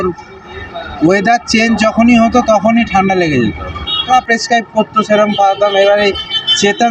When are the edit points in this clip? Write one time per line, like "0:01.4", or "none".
0:04.1